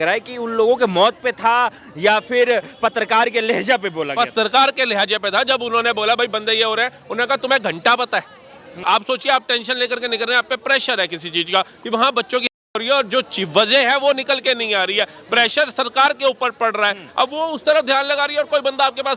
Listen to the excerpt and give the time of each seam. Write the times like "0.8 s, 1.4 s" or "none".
8.8 s